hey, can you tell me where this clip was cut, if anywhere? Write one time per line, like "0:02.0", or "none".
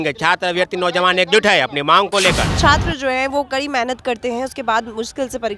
0:02.5

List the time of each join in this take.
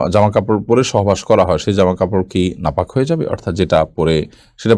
none

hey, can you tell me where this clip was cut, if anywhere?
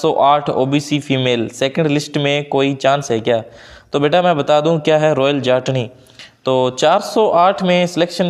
none

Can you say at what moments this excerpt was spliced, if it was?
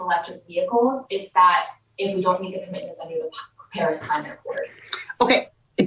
none

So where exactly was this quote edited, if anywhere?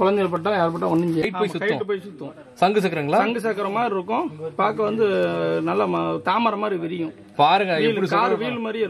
0:01.2

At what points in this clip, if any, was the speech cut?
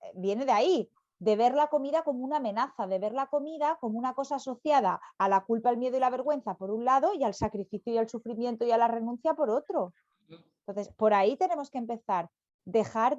none

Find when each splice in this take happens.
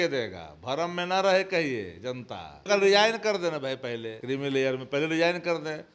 0:02.6
0:04.1

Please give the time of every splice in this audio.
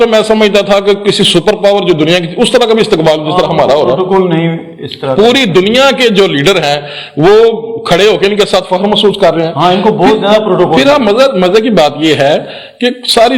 none

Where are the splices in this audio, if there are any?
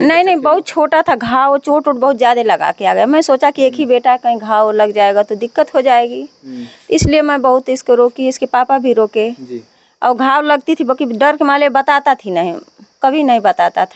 none

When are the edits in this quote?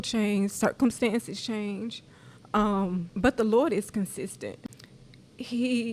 0:03.1
0:04.6

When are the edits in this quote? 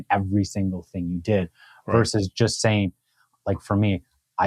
none

